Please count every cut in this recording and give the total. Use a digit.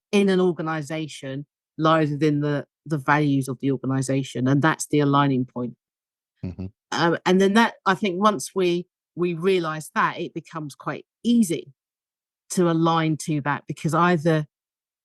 1